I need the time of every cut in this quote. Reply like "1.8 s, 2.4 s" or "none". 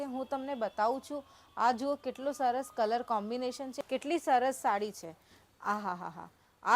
3.8 s